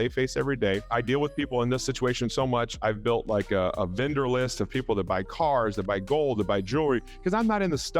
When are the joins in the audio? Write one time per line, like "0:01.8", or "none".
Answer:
0:00.8
0:02.7